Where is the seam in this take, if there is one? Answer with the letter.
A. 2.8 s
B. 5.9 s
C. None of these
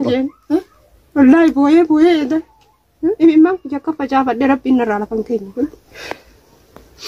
B